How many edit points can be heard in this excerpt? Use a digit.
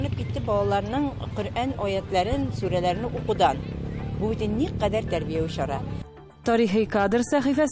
0